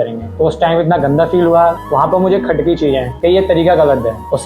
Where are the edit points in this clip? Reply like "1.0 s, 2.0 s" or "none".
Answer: 1.8 s